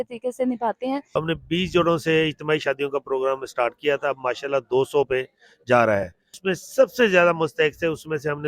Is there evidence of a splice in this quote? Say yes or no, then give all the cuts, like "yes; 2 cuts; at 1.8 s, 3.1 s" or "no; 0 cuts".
yes; 2 cuts; at 1.1 s, 6.4 s